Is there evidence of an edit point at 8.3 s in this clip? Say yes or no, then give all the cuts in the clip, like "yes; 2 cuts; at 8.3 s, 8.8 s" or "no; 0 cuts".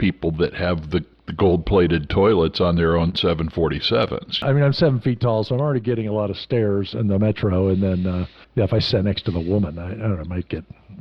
yes; 2 cuts; at 4.4 s, 8.3 s